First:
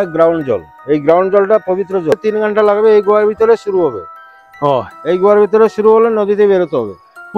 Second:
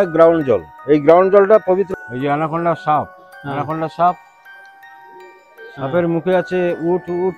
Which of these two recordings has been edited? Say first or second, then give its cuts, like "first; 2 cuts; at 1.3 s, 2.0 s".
second; 1 cut; at 1.9 s